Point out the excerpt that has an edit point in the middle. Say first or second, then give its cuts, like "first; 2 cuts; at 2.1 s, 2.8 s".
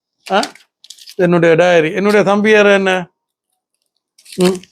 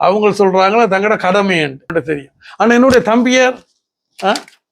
second; 1 cut; at 1.9 s